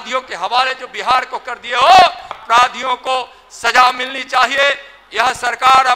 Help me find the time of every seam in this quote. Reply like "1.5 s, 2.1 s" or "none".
2.4 s